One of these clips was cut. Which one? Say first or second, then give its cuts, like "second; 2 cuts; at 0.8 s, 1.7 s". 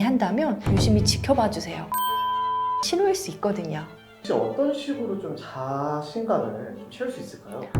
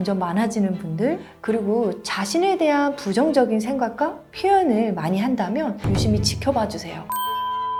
first; 1 cut; at 4.2 s